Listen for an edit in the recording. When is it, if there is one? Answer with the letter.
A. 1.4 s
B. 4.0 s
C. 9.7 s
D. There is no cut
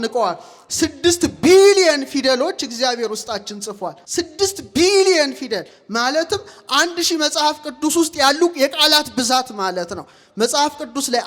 B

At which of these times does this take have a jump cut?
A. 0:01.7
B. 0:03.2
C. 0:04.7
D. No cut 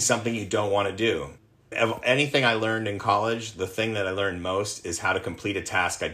A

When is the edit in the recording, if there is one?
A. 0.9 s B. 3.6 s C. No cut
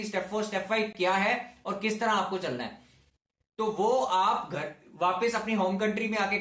C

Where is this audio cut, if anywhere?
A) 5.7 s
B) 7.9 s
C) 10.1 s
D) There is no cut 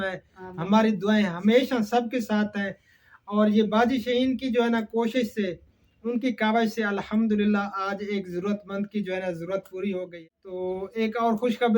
C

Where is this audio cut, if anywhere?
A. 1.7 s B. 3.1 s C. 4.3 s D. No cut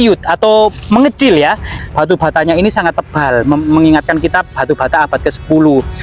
A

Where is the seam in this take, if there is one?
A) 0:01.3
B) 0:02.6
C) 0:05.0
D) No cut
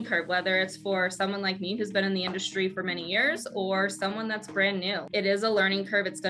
C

